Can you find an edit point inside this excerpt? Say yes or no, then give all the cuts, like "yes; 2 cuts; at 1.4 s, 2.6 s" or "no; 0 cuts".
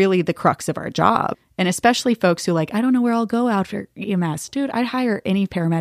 yes; 1 cut; at 1.3 s